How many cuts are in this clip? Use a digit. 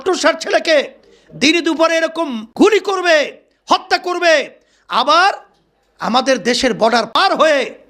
2